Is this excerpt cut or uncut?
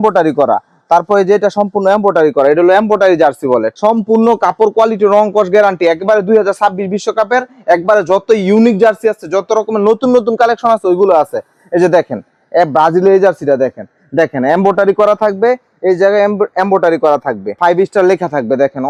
uncut